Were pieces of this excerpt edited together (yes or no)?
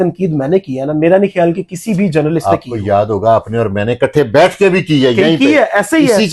no